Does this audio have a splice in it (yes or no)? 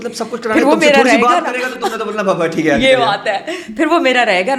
no